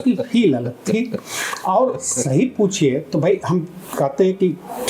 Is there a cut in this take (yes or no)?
no